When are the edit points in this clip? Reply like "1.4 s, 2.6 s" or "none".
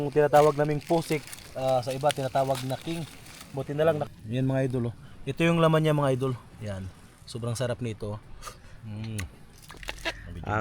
4.1 s, 9.7 s